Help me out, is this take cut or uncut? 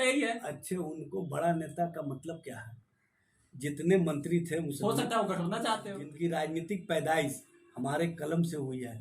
cut